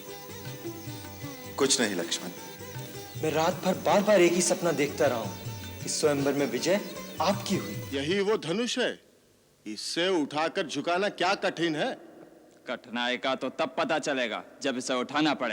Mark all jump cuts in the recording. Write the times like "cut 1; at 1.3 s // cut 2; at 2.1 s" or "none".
cut 1; at 7.8 s